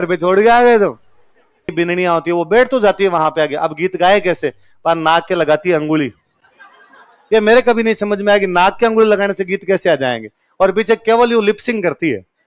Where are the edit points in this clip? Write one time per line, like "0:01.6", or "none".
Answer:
0:01.7